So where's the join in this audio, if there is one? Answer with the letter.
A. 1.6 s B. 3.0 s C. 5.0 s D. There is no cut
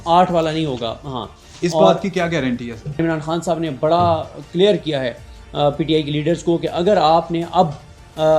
B